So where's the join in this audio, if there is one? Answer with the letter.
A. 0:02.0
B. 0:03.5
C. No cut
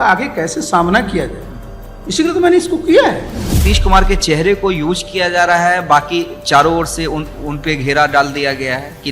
B